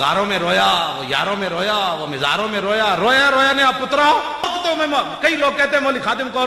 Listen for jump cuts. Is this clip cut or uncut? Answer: cut